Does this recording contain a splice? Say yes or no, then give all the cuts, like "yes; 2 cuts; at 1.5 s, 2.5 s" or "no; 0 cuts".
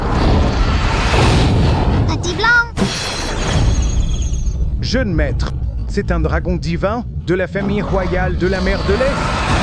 no; 0 cuts